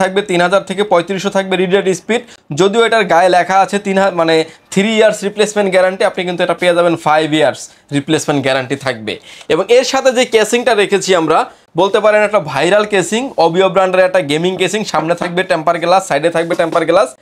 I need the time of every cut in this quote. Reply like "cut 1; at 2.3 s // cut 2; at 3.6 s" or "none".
none